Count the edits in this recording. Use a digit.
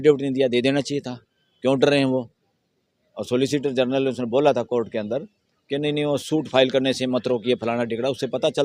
0